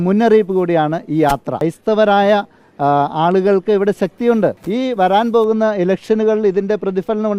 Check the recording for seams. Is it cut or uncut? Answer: cut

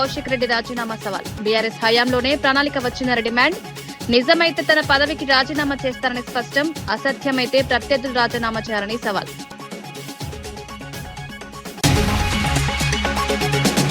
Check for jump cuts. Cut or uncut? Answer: uncut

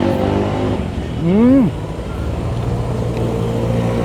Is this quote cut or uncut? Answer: uncut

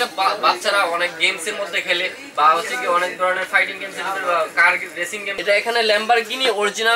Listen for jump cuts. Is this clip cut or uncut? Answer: cut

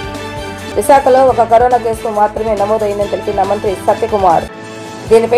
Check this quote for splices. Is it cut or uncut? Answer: uncut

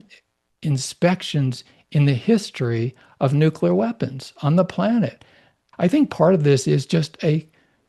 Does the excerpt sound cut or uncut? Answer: cut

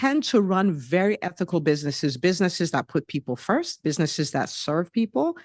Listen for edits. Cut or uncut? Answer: uncut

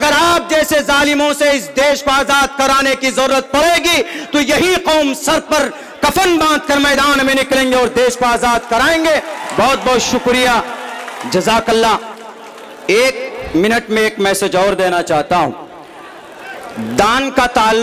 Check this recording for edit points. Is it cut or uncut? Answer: uncut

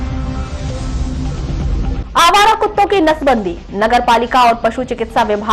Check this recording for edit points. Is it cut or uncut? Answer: cut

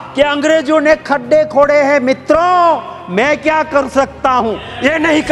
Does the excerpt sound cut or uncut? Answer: uncut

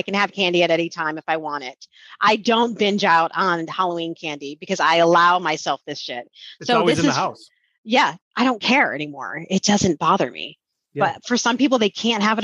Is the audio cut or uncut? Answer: cut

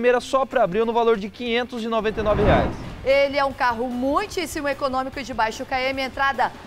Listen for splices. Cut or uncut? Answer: cut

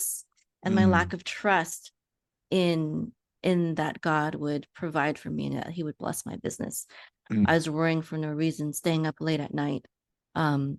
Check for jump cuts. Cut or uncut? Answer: uncut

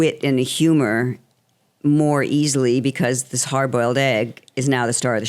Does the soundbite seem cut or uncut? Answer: uncut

